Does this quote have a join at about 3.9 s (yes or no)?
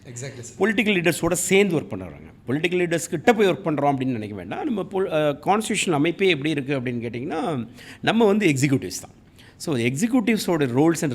no